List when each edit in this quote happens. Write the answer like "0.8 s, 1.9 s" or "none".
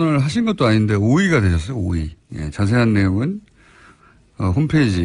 2.9 s